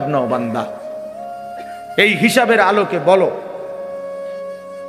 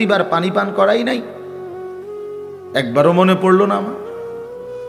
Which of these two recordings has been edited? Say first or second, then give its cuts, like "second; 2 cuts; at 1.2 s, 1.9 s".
second; 1 cut; at 3.9 s